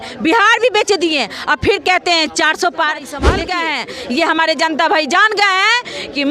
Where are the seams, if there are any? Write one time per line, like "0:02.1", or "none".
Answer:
0:03.3